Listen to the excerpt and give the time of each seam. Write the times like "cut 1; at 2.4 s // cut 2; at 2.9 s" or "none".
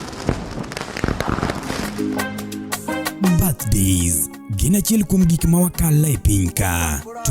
cut 1; at 1.8 s